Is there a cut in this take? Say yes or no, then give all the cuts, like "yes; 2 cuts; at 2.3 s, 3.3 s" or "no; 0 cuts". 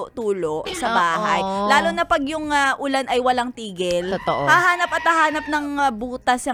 no; 0 cuts